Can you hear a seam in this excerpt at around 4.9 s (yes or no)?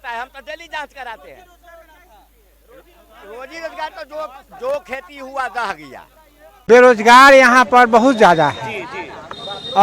no